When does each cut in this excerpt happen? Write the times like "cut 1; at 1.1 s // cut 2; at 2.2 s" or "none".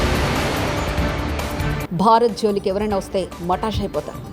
cut 1; at 1.6 s

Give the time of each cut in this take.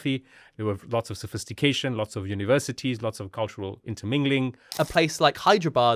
cut 1; at 4.7 s

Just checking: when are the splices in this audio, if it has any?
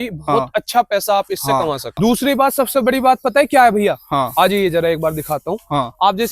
cut 1; at 2.0 s

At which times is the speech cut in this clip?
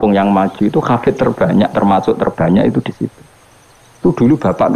none

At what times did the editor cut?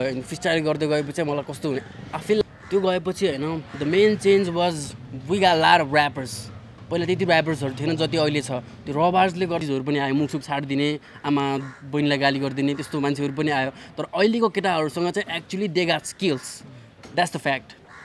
cut 1; at 2.4 s // cut 2; at 9.6 s

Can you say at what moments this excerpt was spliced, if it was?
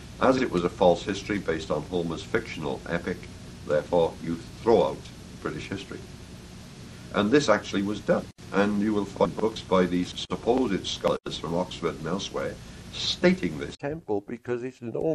cut 1; at 13.8 s

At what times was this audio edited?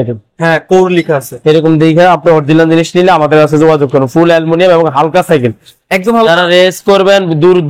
none

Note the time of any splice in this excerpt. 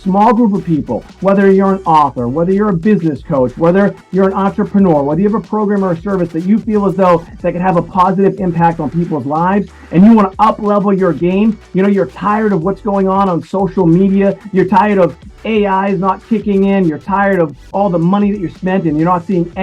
none

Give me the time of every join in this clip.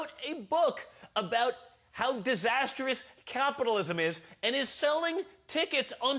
none

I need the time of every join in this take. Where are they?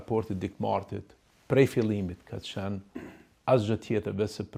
none

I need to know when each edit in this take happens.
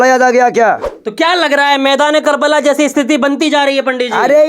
cut 1; at 1.0 s

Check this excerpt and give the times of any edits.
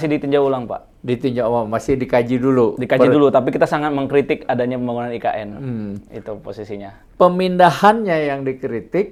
none

